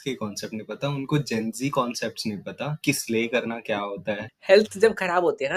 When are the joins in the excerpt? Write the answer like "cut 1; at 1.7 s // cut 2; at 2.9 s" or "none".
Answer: cut 1; at 4.3 s

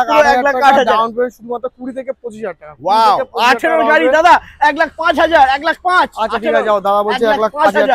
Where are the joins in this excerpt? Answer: none

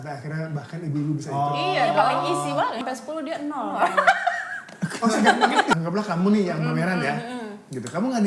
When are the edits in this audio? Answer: cut 1; at 2.8 s // cut 2; at 5.7 s

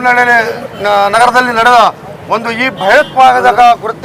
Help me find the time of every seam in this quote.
none

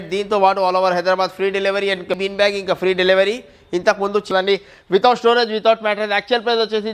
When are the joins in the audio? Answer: cut 1; at 2.2 s // cut 2; at 4.3 s

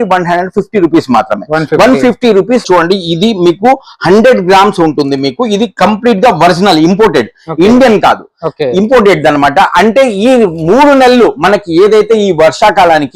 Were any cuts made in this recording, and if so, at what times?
cut 1; at 2.6 s

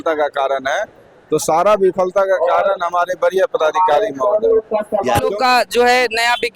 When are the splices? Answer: cut 1; at 5.3 s

